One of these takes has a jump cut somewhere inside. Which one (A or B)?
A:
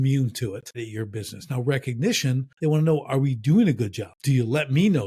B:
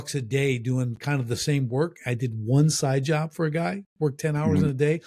A